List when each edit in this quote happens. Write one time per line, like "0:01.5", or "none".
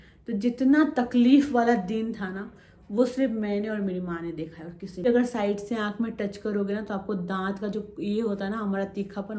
0:05.0